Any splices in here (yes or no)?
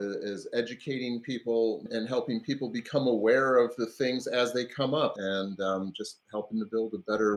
yes